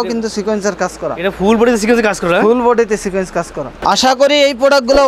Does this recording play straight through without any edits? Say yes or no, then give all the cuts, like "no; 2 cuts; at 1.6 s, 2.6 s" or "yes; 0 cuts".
no; 1 cut; at 3.6 s